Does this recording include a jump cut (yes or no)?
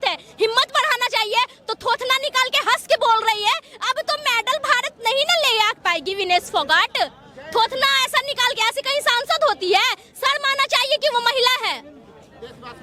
no